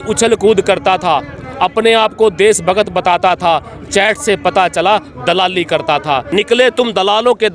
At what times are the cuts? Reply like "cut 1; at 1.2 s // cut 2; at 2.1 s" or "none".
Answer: cut 1; at 6.3 s